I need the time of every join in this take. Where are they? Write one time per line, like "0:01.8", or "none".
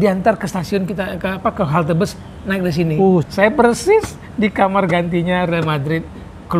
0:03.3